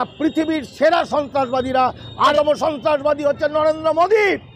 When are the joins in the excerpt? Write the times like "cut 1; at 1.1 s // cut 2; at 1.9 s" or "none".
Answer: cut 1; at 2.3 s